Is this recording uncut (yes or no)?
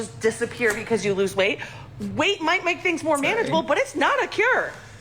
no